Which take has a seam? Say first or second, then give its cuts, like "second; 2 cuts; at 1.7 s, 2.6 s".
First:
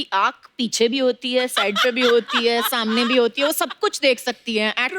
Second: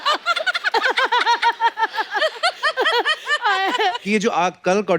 second; 1 cut; at 4.0 s